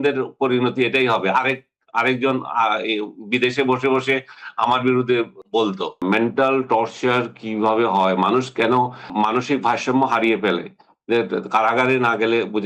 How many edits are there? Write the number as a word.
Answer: two